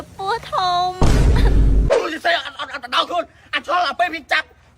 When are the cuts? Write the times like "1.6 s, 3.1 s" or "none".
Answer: 1.9 s